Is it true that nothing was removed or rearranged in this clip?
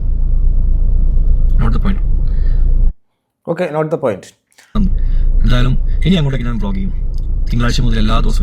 no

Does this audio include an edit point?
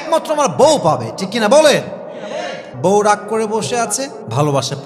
yes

